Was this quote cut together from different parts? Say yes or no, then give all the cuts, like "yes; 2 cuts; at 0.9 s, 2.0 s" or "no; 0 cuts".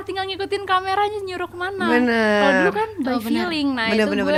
no; 0 cuts